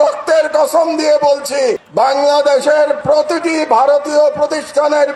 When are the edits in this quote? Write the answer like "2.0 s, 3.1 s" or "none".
none